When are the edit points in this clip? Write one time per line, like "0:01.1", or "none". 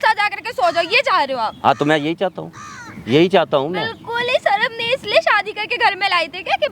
none

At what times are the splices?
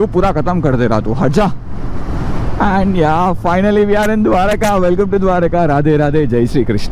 none

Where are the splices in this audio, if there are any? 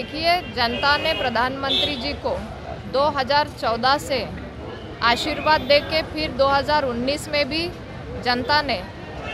none

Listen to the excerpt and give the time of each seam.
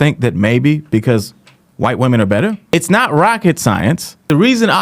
0:02.7

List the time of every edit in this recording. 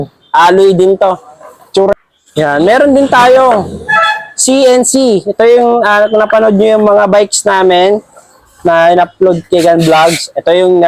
0:01.9

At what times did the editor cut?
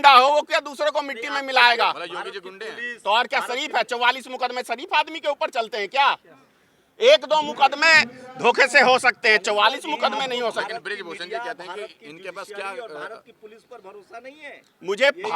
none

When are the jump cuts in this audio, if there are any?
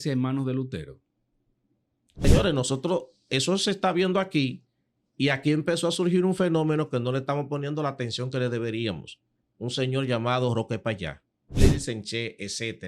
0:02.2
0:11.6

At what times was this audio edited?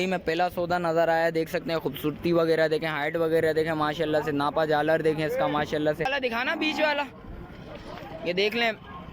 0:06.1

